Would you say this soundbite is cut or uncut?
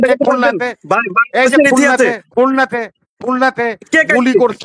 uncut